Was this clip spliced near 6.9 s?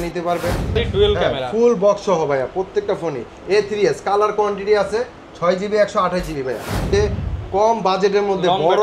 yes; 2 cuts; at 0.8 s, 6.9 s

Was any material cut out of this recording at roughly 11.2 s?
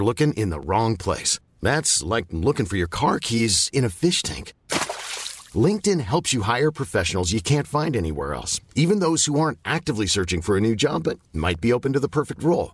no; 0 cuts

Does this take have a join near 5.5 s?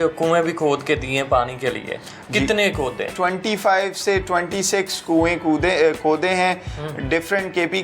no; 1 cut; at 3.1 s

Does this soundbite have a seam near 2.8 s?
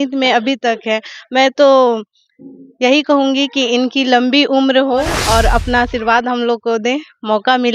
no; 1 cut; at 5.2 s

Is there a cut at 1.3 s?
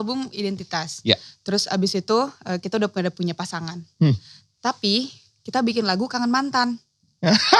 no; 0 cuts

